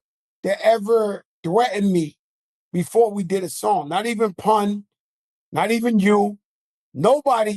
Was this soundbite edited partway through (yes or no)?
no